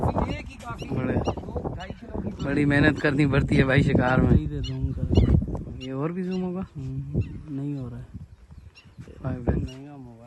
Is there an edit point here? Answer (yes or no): no